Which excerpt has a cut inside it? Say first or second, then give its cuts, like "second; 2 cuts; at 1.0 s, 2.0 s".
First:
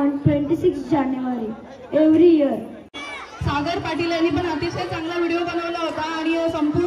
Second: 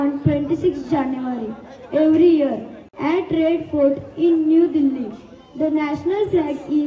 first; 1 cut; at 2.8 s